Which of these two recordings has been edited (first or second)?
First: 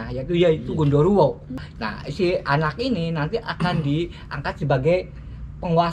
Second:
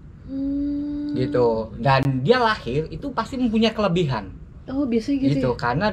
first